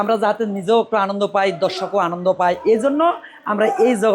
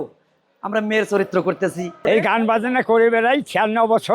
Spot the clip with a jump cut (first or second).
second